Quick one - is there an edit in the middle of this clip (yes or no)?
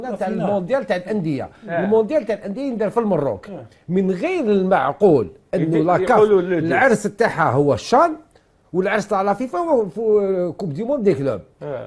no